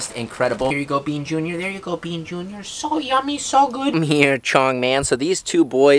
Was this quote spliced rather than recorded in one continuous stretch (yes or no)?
yes